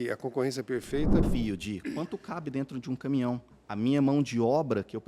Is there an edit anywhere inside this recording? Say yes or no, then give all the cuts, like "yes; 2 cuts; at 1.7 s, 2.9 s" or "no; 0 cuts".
yes; 2 cuts; at 1.3 s, 3.6 s